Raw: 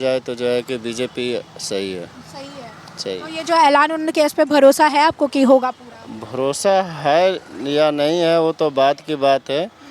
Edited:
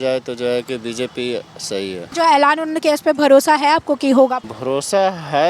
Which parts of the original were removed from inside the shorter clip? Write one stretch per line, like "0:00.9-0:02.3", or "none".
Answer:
0:02.1-0:03.4
0:05.8-0:06.2